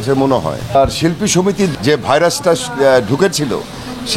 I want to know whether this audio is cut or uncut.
cut